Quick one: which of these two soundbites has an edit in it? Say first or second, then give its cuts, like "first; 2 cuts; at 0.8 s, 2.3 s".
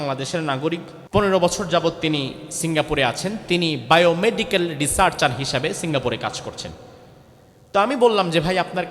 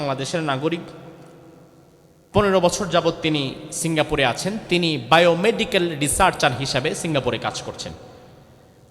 first; 1 cut; at 0.9 s